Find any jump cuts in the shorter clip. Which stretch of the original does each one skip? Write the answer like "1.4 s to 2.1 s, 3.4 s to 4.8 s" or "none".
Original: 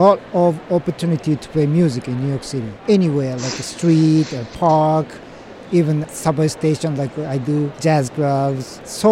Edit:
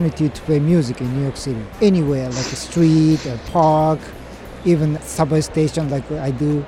none